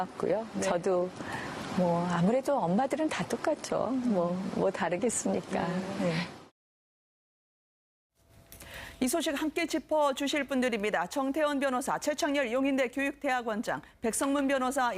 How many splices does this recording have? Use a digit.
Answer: 1